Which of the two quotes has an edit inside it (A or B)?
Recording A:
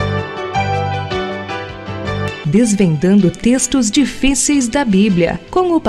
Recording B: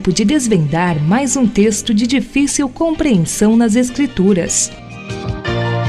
B